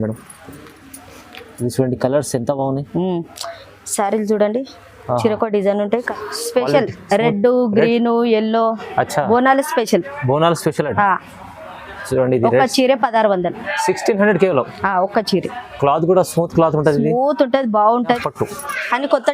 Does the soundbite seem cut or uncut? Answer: cut